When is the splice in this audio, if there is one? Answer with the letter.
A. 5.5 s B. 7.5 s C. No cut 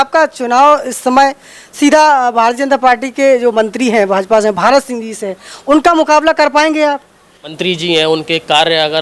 B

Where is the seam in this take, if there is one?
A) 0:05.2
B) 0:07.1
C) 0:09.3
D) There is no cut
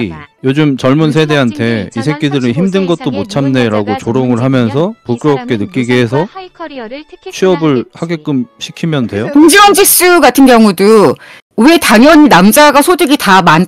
C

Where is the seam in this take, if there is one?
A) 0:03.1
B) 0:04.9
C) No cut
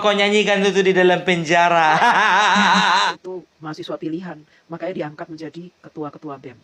A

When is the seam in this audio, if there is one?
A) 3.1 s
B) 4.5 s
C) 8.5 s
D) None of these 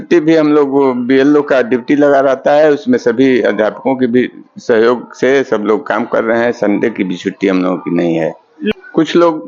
C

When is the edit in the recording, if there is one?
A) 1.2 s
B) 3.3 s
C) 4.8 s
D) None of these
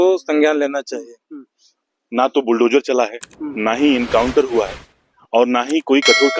A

